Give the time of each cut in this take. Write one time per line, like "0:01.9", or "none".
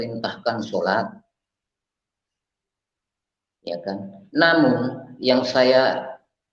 none

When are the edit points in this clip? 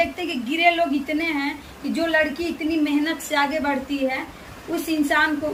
none

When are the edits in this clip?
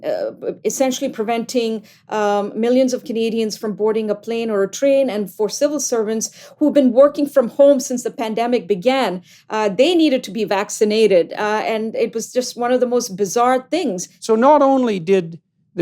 0:14.1

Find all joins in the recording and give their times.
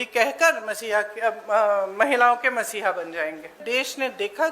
0:03.6

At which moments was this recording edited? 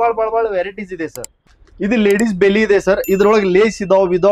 0:01.4

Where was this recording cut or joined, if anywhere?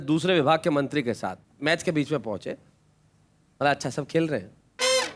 none

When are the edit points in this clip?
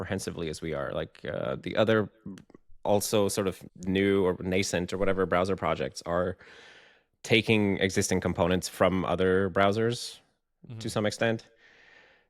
0:03.7

